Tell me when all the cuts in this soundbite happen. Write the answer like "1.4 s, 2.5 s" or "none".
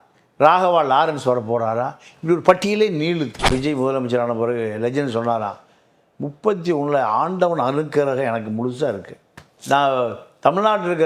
3.5 s